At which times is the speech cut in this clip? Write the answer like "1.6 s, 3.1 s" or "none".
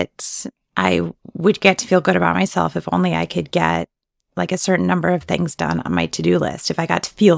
none